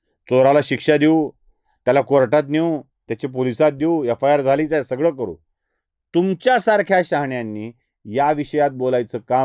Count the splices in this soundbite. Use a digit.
0